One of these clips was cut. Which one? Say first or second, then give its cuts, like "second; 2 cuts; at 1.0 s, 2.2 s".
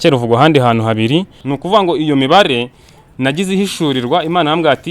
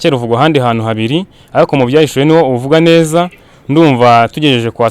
first; 1 cut; at 1.4 s